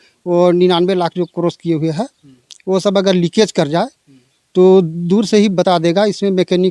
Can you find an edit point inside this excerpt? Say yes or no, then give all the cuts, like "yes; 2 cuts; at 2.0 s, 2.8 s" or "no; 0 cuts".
no; 0 cuts